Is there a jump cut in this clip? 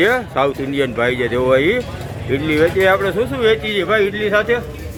no; 0 cuts

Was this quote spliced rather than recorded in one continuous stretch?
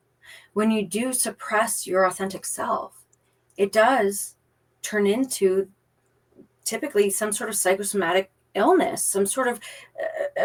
no; 0 cuts

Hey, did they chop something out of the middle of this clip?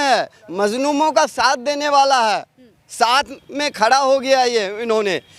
no; 0 cuts

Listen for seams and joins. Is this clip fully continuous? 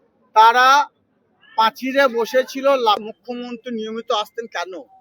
no; 1 cut; at 3.1 s

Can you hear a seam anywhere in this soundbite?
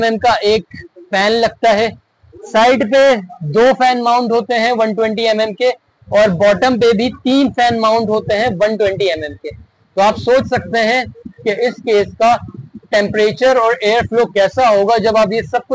no; 0 cuts

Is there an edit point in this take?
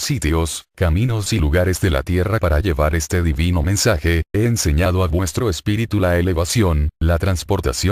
no; 0 cuts

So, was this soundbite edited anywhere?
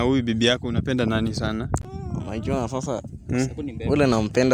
yes; 1 cut; at 1.8 s

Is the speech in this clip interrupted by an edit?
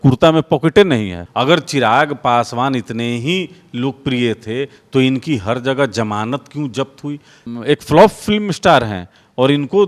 yes; 2 cuts; at 1.2 s, 7.4 s

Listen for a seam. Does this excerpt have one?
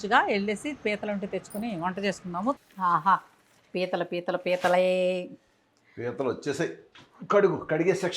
yes; 1 cut; at 2.6 s

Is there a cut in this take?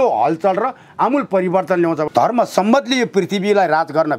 yes; 1 cut; at 2.1 s

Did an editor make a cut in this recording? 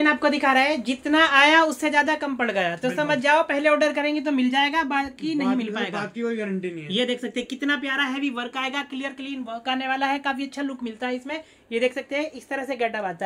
no; 0 cuts

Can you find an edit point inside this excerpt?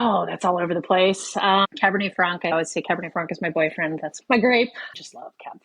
yes; 1 cut; at 1.3 s

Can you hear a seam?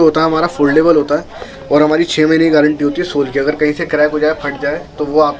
no; 0 cuts

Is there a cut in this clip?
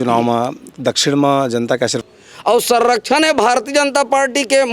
yes; 1 cut; at 2.0 s

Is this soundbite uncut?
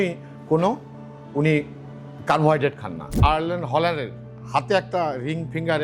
no; 1 cut; at 3.2 s

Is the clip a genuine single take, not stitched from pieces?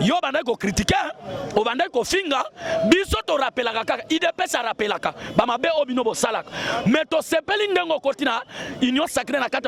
yes; 0 cuts

